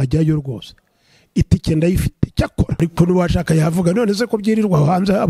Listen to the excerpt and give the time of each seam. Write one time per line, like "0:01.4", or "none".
0:02.7